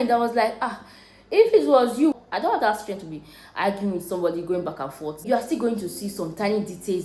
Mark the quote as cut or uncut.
cut